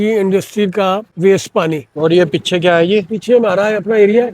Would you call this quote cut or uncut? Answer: cut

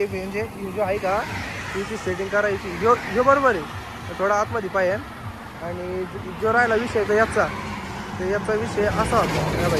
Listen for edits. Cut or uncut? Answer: uncut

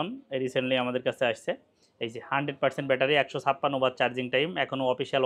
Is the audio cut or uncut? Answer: uncut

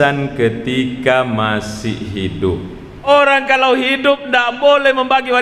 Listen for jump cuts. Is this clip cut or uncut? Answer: cut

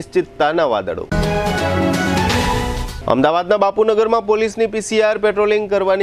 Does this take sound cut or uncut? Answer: uncut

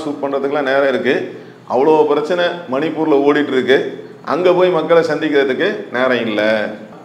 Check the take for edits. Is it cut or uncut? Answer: uncut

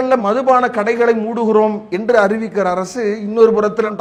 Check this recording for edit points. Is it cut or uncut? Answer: uncut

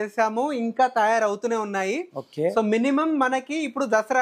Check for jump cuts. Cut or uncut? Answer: uncut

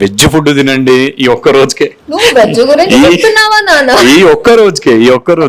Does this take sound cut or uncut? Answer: cut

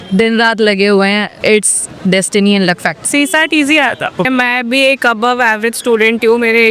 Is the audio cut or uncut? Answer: cut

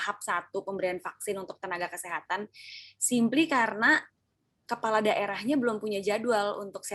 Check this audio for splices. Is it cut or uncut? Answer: uncut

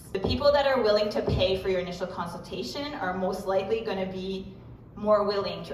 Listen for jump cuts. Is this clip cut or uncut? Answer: uncut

